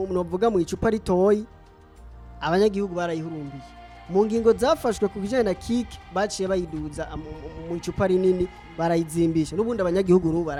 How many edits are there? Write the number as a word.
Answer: zero